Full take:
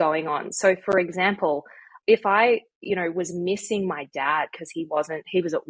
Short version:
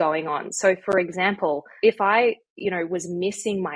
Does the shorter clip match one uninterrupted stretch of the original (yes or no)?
no